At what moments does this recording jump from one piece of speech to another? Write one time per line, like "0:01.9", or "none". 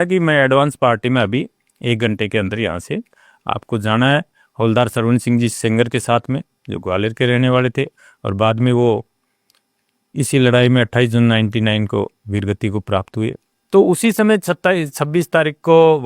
0:13.5

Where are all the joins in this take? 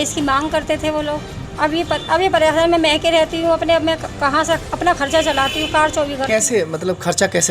0:01.4

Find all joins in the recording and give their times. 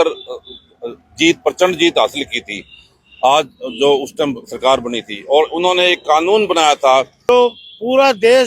0:07.3

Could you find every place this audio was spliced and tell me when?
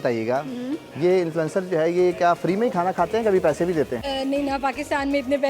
0:04.0

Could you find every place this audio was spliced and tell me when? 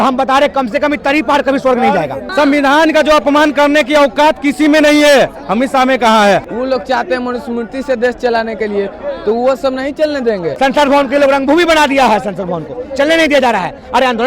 0:02.2
0:06.5
0:10.5

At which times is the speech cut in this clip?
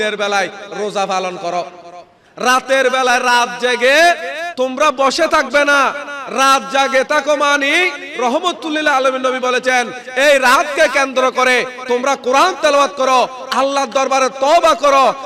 none

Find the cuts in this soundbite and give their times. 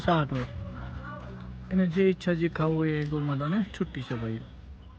none

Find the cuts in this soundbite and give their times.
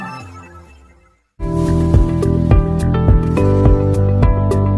0:01.2

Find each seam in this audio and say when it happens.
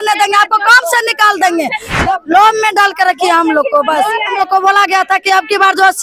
0:01.9
0:04.4

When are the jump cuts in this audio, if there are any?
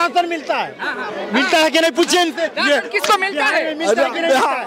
none

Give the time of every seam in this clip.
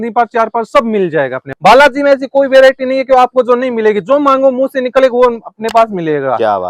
0:01.4

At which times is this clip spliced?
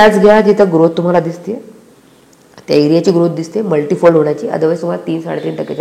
none

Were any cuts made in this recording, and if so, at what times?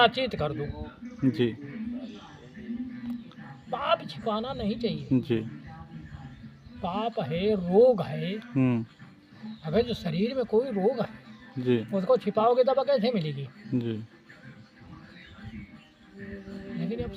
none

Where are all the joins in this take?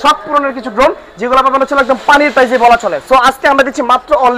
none

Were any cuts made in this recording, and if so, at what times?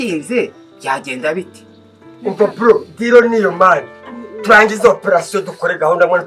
0:02.2

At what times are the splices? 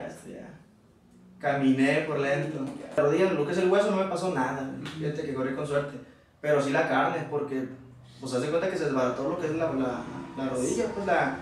0:03.0

